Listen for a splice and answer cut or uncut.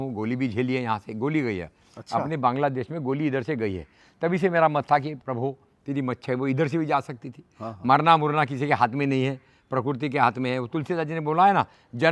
uncut